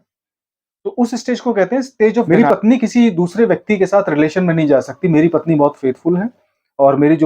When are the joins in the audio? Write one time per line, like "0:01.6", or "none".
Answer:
0:02.3